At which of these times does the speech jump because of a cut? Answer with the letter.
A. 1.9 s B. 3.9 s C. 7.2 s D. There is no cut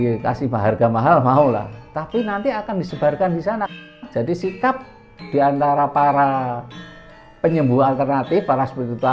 B